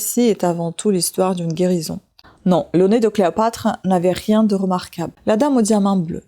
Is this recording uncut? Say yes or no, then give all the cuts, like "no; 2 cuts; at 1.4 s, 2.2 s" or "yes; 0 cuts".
no; 2 cuts; at 2.2 s, 5.1 s